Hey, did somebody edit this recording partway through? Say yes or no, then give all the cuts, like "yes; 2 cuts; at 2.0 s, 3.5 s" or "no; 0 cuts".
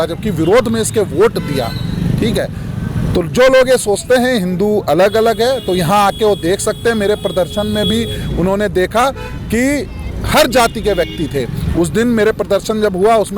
no; 0 cuts